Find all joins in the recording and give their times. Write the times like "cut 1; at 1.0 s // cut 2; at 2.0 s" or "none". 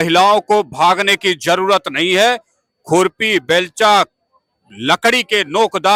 none